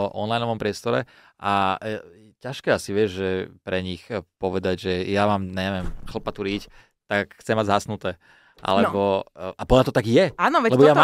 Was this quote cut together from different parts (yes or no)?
no